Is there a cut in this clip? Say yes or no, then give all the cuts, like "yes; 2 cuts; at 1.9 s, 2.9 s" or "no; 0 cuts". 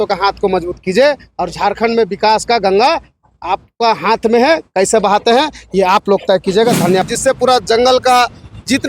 yes; 1 cut; at 7.0 s